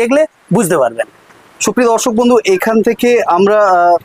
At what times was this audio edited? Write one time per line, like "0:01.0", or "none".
none